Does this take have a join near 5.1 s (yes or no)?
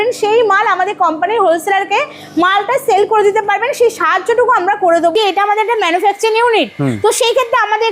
yes